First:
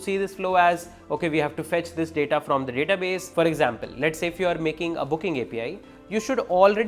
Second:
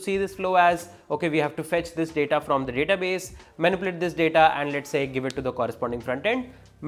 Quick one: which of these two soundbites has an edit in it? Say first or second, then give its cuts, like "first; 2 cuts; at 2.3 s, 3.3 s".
first; 1 cut; at 3.2 s